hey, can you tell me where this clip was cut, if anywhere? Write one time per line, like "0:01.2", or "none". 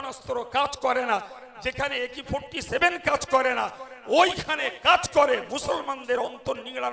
none